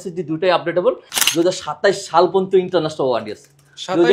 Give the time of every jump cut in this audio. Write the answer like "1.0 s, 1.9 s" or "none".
1.2 s